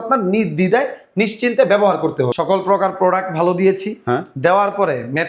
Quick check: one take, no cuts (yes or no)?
no